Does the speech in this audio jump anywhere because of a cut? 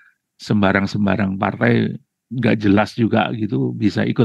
no; 0 cuts

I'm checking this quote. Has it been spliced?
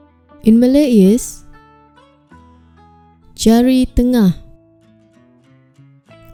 no; 0 cuts

